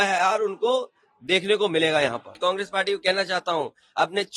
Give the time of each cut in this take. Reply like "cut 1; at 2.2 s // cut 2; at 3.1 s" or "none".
cut 1; at 2.3 s

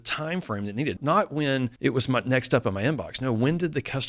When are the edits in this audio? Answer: cut 1; at 1.0 s // cut 2; at 1.7 s

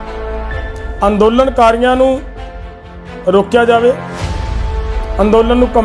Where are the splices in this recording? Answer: cut 1; at 1.0 s

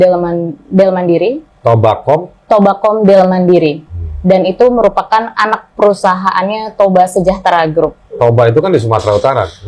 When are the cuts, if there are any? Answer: none

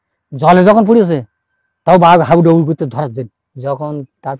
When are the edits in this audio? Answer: cut 1; at 3.4 s

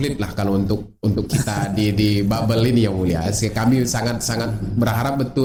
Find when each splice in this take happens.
none

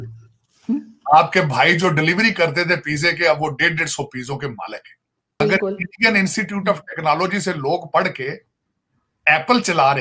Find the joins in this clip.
cut 1; at 5.4 s

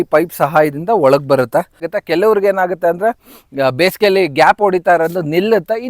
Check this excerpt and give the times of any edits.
cut 1; at 1.9 s

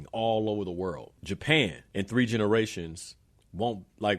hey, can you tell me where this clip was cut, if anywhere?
cut 1; at 1.1 s // cut 2; at 1.8 s

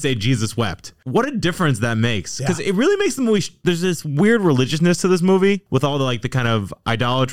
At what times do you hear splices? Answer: none

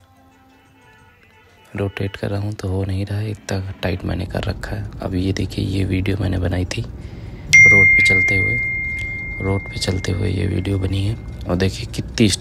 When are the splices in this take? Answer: none

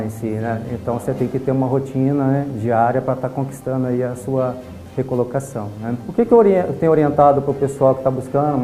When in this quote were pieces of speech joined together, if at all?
cut 1; at 6.0 s

